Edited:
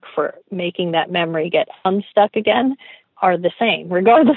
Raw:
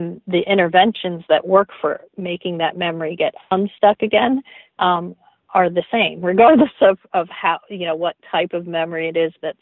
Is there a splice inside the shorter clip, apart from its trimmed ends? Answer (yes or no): yes